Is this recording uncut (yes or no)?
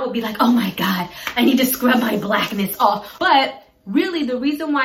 no